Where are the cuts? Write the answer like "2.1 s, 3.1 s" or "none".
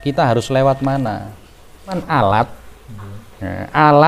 2.0 s